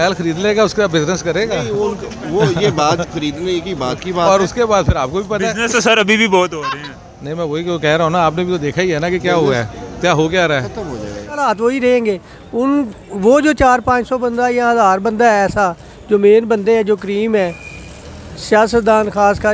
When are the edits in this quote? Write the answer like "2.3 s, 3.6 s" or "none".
11.4 s